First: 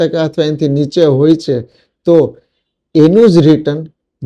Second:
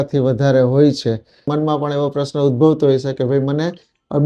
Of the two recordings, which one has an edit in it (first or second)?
second